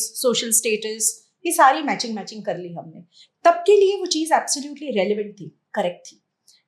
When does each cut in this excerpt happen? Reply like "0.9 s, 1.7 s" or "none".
3.2 s